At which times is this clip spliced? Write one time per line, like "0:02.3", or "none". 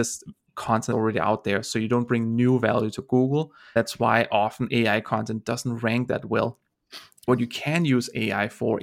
0:00.9
0:03.6
0:07.2